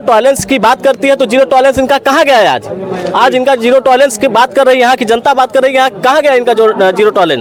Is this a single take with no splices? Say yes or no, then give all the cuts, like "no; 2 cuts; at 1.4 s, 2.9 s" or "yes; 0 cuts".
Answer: yes; 0 cuts